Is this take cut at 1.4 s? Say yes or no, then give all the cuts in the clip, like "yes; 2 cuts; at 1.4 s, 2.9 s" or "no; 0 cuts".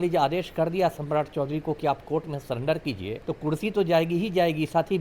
no; 1 cut; at 3.2 s